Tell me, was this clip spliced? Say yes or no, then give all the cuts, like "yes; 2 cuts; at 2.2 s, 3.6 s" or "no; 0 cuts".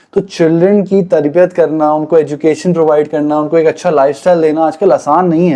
no; 0 cuts